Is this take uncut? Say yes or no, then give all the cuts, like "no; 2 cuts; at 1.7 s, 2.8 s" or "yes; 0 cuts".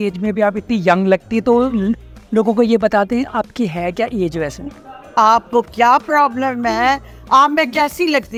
yes; 0 cuts